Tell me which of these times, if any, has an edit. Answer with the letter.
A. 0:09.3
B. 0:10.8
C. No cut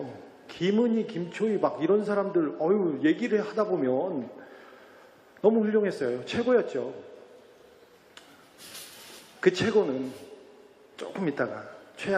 A